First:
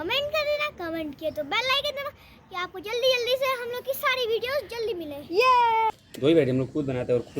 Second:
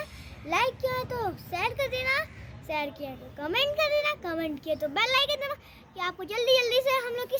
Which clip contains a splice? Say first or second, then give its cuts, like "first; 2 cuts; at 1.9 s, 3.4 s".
first; 1 cut; at 5.9 s